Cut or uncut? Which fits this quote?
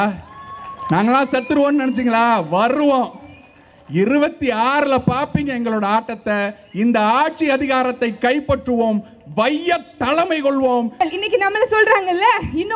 cut